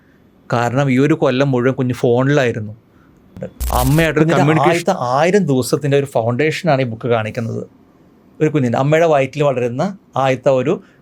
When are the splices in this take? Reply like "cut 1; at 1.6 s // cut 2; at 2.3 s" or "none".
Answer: cut 1; at 4.7 s